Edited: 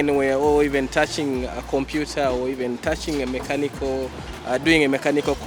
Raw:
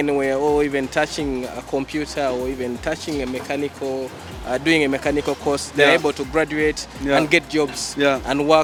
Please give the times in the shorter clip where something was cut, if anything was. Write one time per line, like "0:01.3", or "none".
none